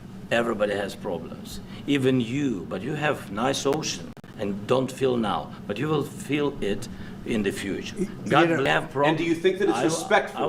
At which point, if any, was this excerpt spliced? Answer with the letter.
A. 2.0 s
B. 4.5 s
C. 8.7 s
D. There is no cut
C